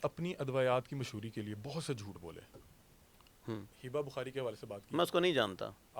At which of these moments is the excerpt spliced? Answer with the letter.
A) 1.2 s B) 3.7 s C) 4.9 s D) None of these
B